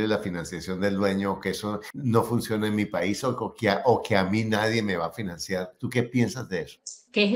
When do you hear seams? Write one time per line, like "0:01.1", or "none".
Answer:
none